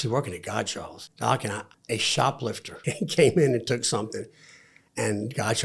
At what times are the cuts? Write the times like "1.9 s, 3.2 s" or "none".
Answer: 1.0 s, 1.7 s, 2.8 s